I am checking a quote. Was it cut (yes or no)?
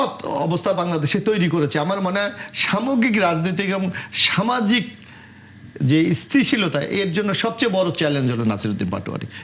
no